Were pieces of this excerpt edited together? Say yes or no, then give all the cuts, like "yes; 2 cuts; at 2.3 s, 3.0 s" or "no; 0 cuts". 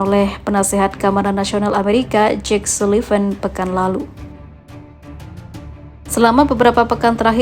no; 0 cuts